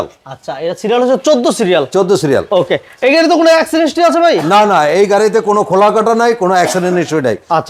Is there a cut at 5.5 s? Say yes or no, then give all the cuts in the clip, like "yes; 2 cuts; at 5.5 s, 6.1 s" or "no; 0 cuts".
no; 0 cuts